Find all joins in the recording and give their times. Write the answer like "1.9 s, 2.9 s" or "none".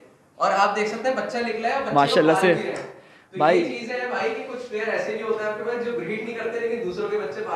none